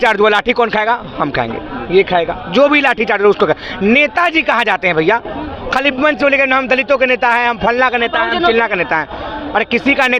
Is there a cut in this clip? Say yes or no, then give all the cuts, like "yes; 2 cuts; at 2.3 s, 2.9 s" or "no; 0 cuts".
no; 0 cuts